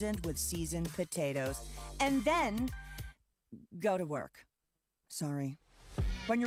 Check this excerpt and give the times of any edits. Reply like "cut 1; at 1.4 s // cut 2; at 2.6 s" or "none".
none